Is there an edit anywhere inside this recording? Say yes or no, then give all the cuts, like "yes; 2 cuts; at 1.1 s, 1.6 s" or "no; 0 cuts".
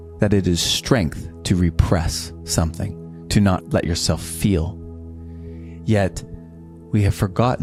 no; 0 cuts